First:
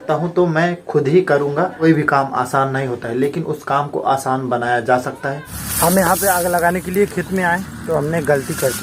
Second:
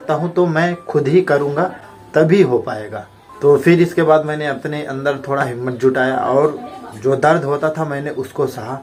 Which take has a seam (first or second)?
first